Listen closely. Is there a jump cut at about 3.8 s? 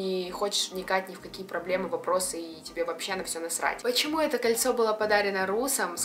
yes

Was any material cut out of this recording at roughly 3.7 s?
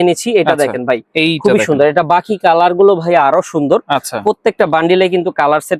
no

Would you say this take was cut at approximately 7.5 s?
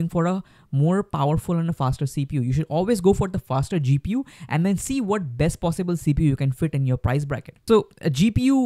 yes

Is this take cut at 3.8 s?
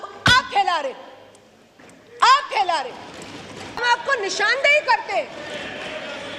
yes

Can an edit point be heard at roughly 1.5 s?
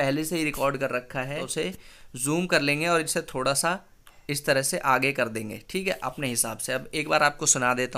yes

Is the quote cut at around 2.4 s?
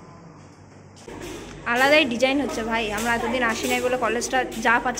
no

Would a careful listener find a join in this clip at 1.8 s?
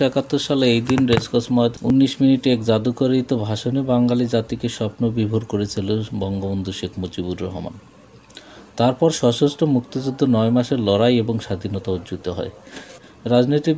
yes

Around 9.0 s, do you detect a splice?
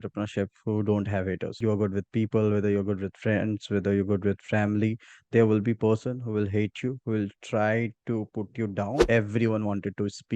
yes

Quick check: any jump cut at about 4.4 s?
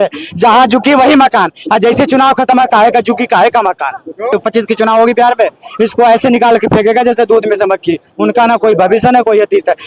yes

